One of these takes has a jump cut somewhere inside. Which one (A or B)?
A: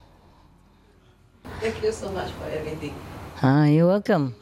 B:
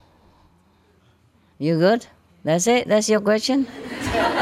A